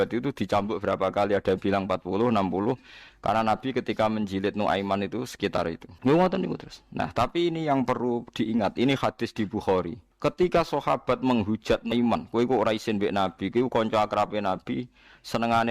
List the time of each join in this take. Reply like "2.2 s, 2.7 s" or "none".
5.9 s, 10.0 s